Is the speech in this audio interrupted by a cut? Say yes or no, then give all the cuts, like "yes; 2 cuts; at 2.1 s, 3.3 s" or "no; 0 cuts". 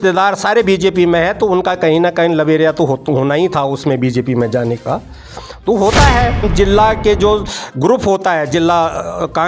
yes; 1 cut; at 6.4 s